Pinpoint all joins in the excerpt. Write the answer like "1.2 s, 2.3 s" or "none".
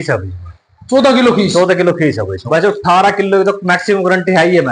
2.4 s